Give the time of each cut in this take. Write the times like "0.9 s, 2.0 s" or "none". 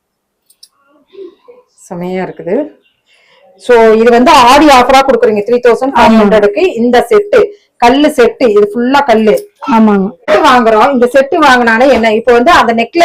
10.3 s